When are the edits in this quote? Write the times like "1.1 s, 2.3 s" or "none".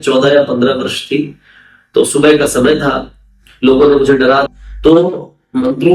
4.5 s